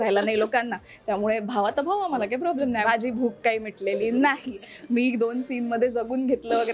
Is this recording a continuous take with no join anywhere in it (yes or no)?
no